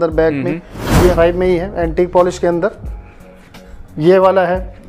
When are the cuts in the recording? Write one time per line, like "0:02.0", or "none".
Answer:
0:01.1

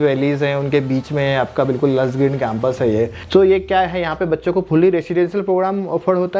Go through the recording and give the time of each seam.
none

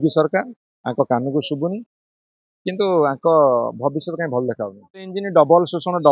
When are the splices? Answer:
0:05.2

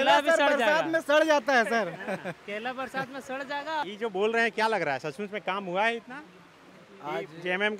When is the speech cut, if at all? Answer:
none

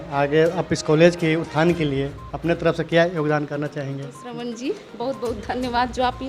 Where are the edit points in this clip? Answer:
0:04.2

